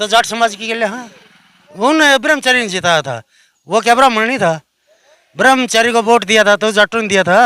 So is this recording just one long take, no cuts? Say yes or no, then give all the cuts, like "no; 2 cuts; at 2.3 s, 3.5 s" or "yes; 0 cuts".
no; 1 cut; at 1.6 s